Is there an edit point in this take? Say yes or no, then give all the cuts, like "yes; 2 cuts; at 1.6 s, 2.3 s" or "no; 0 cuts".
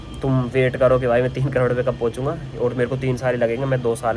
no; 0 cuts